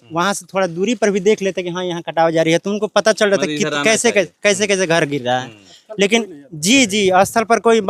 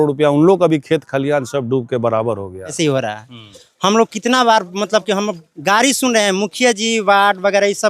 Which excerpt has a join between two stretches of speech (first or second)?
second